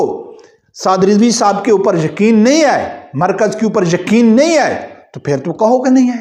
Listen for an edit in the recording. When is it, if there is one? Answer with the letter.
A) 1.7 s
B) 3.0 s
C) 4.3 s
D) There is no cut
D